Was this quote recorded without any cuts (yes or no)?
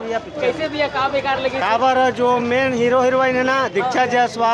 yes